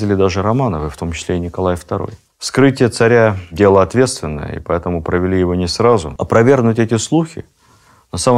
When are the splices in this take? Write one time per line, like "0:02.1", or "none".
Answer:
0:02.2
0:06.2